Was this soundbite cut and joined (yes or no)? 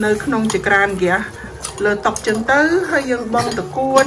no